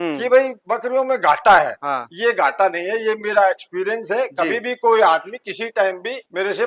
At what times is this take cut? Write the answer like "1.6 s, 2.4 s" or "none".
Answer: none